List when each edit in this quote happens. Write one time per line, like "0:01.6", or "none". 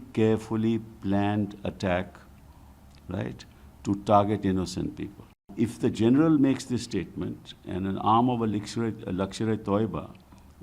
0:05.5